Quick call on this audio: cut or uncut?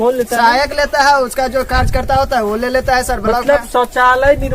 uncut